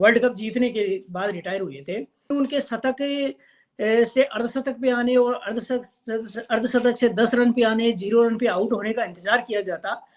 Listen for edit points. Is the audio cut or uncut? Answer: cut